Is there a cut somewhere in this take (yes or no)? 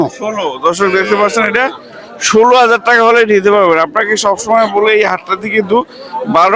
no